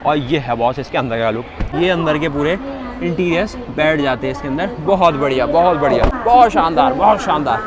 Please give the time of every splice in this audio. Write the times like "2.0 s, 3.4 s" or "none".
1.7 s, 6.2 s